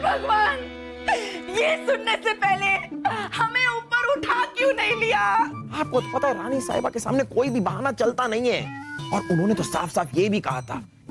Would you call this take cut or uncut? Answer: cut